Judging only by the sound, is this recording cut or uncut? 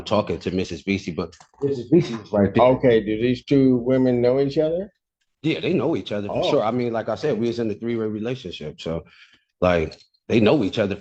uncut